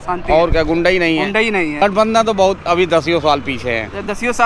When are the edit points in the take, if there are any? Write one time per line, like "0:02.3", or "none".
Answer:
0:01.8